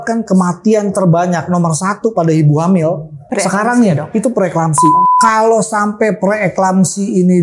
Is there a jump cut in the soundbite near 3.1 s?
yes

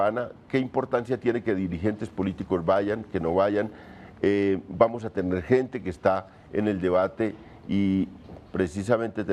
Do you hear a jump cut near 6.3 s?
no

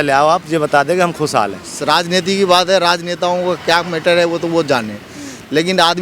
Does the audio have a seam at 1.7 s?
yes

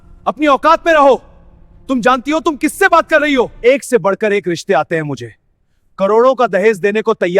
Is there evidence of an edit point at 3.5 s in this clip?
yes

